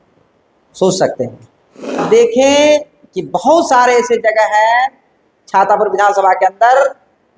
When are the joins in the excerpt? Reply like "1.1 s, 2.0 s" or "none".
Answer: 2.0 s